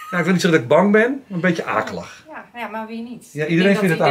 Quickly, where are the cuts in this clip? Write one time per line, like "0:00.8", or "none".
none